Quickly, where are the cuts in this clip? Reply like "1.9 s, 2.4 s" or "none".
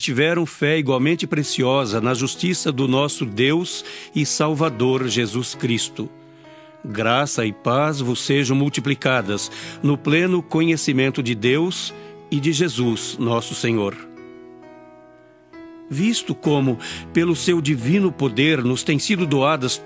3.7 s, 18.8 s